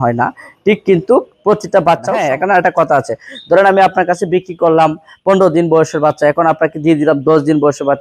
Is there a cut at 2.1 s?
yes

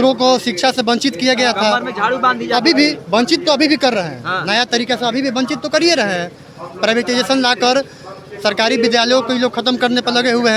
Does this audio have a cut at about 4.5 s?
no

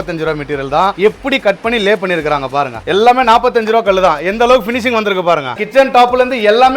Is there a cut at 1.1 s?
no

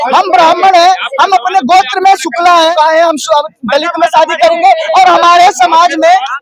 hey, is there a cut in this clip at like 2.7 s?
yes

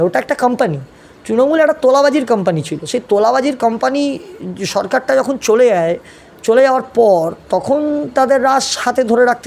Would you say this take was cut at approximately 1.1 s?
no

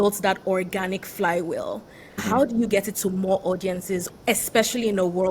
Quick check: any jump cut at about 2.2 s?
yes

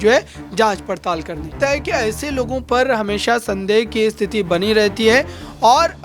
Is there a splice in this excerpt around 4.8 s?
no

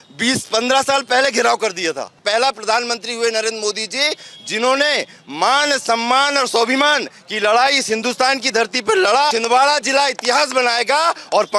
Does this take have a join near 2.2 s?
yes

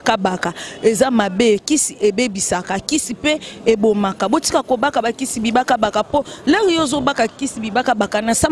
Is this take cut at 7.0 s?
no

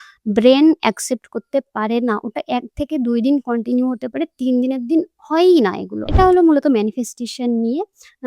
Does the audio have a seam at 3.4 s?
no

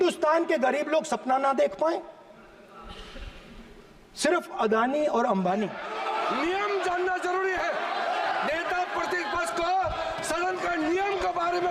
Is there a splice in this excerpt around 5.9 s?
yes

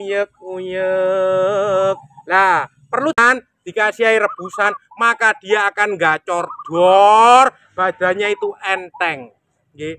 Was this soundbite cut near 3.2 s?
yes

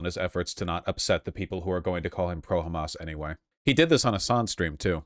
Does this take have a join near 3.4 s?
yes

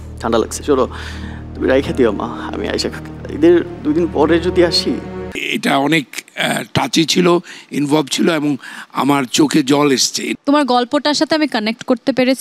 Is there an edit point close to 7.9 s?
no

